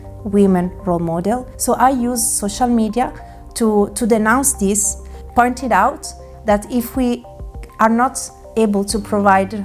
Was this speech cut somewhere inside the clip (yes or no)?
no